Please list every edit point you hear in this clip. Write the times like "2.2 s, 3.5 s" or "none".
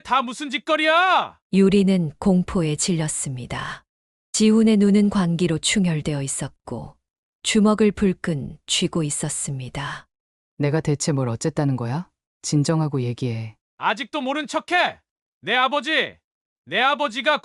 none